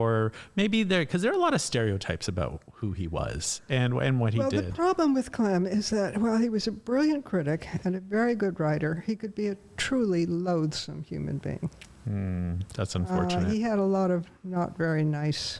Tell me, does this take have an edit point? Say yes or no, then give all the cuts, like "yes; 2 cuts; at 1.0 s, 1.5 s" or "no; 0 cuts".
no; 0 cuts